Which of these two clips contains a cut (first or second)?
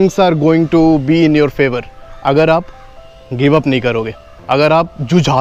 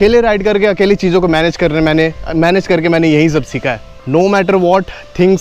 second